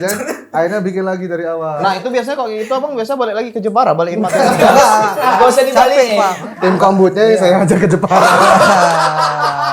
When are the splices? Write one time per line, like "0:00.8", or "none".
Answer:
0:01.8
0:06.4